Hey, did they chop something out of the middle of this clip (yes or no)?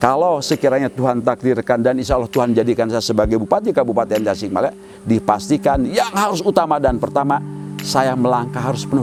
no